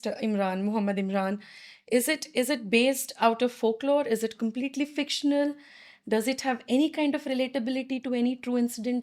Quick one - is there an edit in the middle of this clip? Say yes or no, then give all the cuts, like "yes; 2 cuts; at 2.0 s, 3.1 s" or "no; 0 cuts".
no; 0 cuts